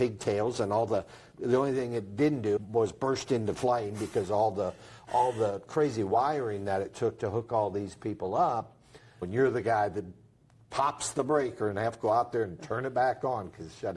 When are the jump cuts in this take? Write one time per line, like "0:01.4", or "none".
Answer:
0:02.6
0:09.3